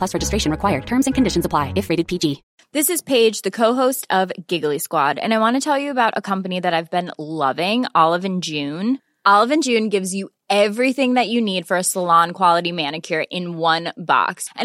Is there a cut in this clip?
yes; 1 cut; at 2.5 s

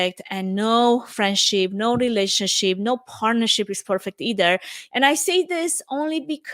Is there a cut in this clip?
yes; 1 cut; at 4.8 s

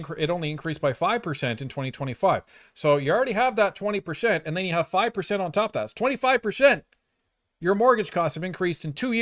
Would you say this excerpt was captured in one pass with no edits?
yes; 0 cuts

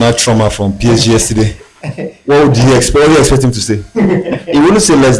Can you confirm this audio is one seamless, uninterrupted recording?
yes; 0 cuts

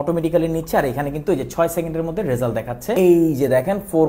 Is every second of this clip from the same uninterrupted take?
no; 1 cut; at 3.0 s

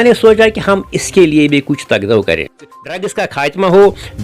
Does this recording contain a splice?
yes; 1 cut; at 2.9 s

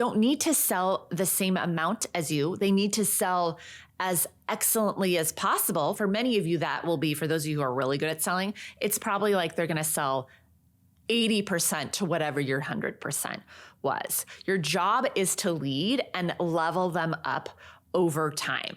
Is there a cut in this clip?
no; 0 cuts

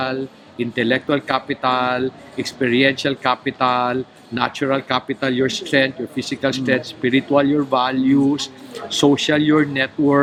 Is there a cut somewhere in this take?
no; 0 cuts

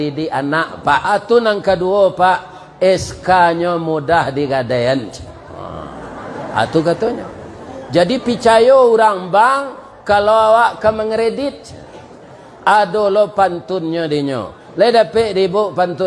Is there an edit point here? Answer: yes; 2 cuts; at 1.0 s, 5.8 s

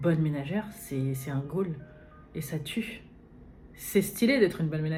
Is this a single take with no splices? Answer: yes; 0 cuts

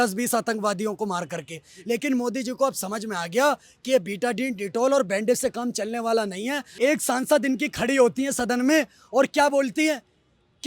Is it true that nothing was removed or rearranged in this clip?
no; 1 cut; at 6.6 s

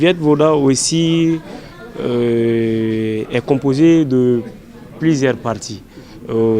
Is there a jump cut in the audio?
no; 0 cuts

